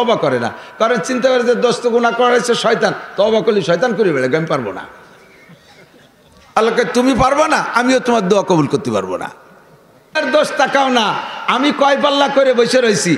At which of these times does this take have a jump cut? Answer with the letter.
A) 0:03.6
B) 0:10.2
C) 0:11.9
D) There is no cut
B